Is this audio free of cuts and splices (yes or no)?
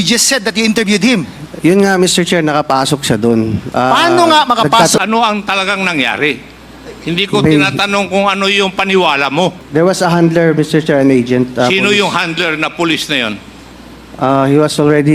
no